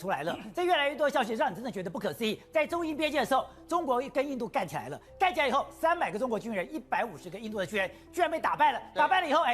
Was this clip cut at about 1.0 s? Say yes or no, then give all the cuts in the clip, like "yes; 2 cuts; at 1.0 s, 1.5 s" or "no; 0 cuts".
no; 0 cuts